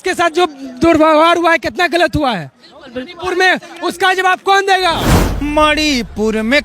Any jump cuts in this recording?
yes; 1 cut; at 5.2 s

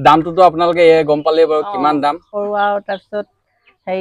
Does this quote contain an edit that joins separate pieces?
yes; 1 cut; at 2.3 s

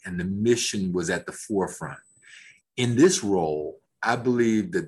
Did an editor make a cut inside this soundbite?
no; 0 cuts

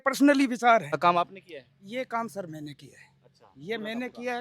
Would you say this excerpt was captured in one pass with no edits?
no; 1 cut; at 1.0 s

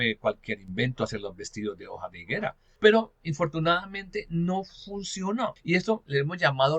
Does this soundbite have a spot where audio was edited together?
yes; 2 cuts; at 2.6 s, 5.6 s

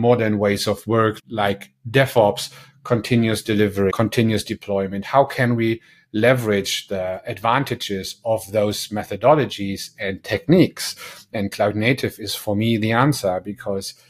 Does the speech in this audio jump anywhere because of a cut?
yes; 1 cut; at 3.9 s

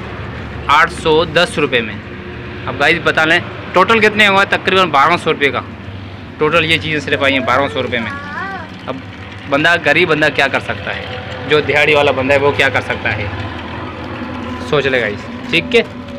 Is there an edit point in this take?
no; 0 cuts

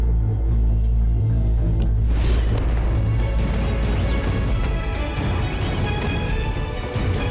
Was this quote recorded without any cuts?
yes; 0 cuts

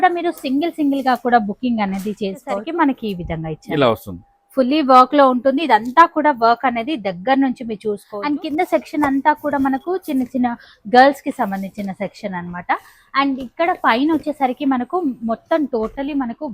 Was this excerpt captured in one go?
no; 2 cuts; at 2.6 s, 8.1 s

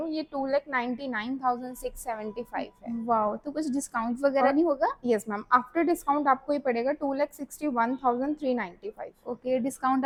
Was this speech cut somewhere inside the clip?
no; 0 cuts

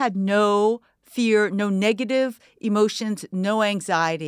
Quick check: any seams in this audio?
no; 0 cuts

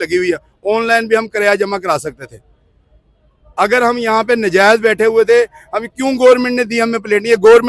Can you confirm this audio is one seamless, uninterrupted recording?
yes; 0 cuts

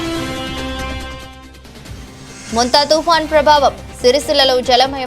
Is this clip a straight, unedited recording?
no; 1 cut; at 1.4 s

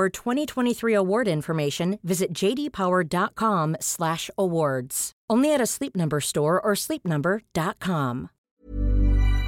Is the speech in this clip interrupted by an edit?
yes; 1 cut; at 8.6 s

